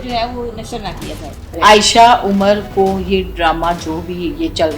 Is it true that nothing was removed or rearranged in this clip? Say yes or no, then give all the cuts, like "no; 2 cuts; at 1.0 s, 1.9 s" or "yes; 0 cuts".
no; 1 cut; at 1.4 s